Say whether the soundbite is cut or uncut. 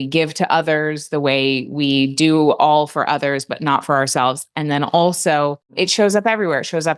uncut